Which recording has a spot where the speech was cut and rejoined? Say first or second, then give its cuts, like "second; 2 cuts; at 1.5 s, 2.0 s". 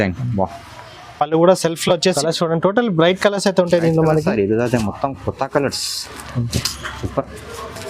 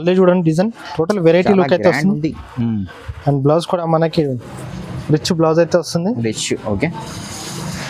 first; 1 cut; at 2.2 s